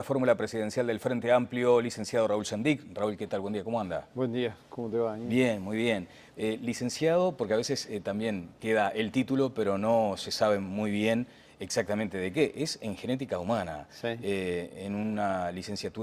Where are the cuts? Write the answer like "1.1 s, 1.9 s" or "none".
none